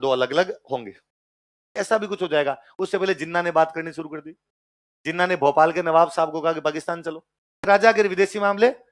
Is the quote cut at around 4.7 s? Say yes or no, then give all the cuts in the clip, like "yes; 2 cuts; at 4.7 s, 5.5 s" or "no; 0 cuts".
no; 2 cuts; at 1.7 s, 7.7 s